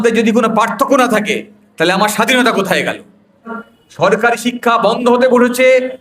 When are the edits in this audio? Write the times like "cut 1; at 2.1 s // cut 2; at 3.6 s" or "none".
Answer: cut 1; at 3.6 s

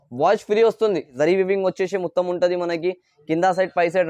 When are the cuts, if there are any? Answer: cut 1; at 1.1 s

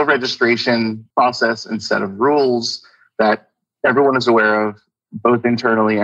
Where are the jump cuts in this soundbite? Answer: cut 1; at 1.0 s

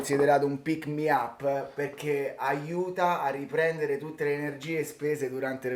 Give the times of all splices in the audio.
none

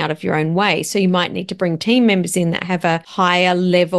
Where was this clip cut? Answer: cut 1; at 3.1 s

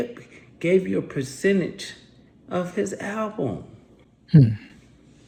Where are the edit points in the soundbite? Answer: none

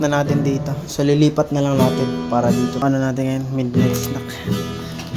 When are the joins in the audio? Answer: cut 1; at 2.8 s

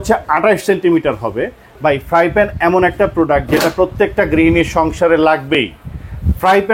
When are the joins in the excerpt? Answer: cut 1; at 1.6 s

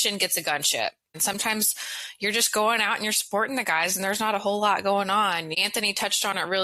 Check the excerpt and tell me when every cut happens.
cut 1; at 1.1 s // cut 2; at 5.6 s

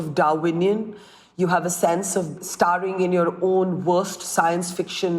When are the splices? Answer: cut 1; at 2.4 s

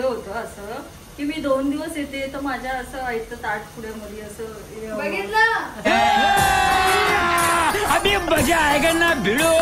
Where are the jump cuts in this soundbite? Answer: none

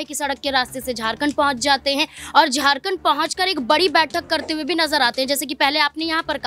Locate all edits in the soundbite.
none

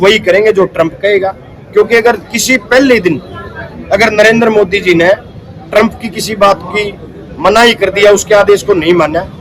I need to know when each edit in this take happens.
none

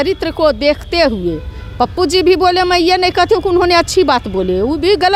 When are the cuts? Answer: none

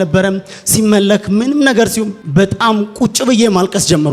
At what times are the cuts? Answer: cut 1; at 2.2 s

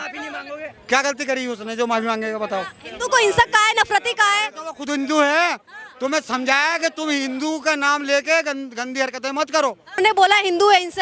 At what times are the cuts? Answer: cut 1; at 10.0 s

